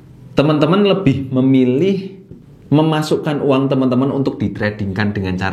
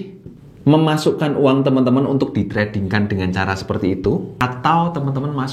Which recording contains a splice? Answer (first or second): second